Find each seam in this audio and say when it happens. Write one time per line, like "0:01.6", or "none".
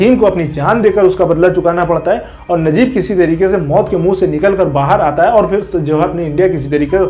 none